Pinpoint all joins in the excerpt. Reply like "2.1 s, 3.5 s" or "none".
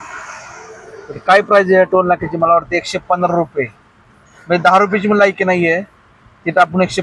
none